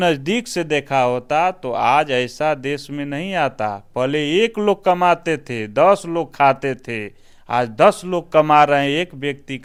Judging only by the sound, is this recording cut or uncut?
uncut